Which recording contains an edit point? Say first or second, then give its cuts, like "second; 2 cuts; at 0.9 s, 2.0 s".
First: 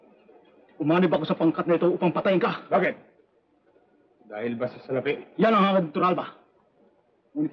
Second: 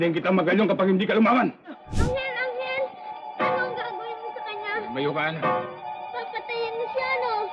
second; 1 cut; at 1.9 s